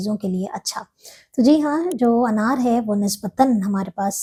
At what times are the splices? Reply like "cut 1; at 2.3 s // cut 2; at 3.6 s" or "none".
none